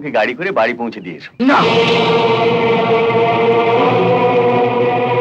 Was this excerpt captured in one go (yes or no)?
no